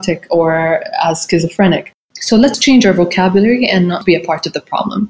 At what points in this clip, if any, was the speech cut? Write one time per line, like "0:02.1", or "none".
0:02.6
0:04.0